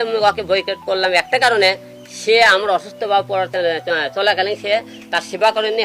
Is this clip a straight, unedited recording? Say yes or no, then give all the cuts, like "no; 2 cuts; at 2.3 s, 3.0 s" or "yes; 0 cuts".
yes; 0 cuts